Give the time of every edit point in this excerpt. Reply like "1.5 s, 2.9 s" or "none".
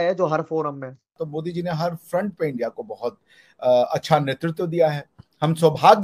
1.1 s